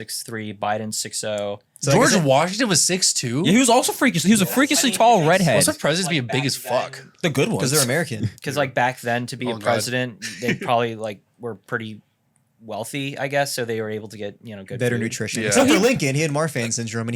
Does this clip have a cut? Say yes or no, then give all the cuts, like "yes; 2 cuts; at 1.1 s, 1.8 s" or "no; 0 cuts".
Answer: yes; 1 cut; at 5.6 s